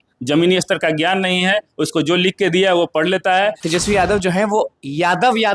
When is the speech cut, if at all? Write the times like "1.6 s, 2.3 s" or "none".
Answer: 3.6 s